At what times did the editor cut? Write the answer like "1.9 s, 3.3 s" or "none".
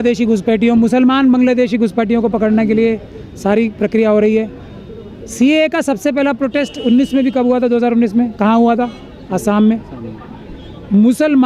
none